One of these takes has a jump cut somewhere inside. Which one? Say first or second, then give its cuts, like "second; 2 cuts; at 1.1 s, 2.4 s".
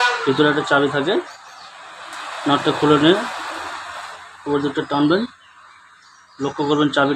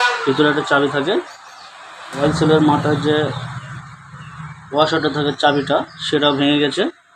second; 1 cut; at 2.2 s